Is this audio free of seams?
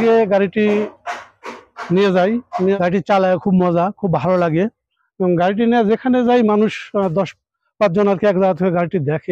no; 1 cut; at 2.8 s

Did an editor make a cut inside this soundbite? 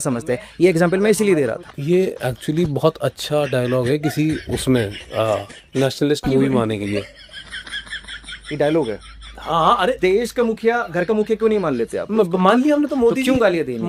no; 0 cuts

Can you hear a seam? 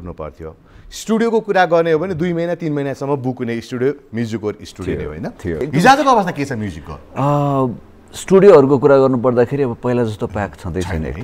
yes; 1 cut; at 5.7 s

